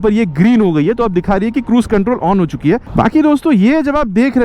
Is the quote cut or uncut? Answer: cut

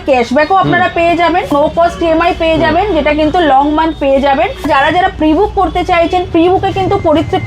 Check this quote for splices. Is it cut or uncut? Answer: cut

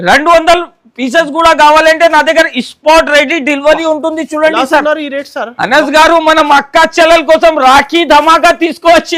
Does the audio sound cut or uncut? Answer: uncut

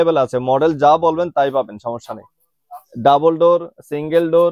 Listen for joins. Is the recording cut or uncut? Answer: uncut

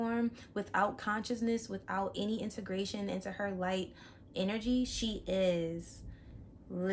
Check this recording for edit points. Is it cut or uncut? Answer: uncut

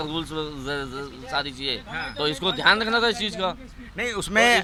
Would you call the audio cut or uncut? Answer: uncut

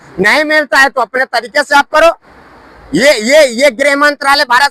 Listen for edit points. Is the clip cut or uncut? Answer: uncut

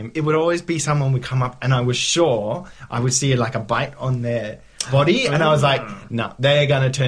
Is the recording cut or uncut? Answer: uncut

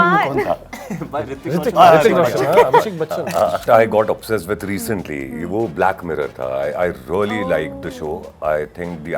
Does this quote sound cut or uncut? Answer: cut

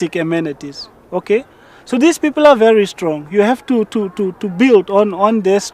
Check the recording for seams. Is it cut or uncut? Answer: uncut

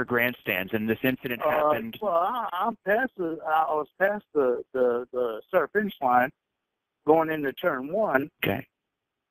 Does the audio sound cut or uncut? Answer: uncut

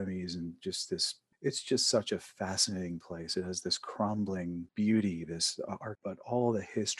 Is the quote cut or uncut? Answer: cut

